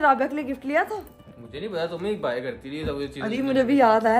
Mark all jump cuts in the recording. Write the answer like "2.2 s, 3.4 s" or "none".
none